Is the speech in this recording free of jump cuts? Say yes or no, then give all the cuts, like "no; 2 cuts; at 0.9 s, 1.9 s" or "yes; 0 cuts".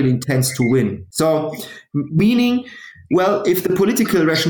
yes; 0 cuts